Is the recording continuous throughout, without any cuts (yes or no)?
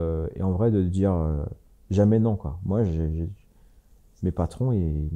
yes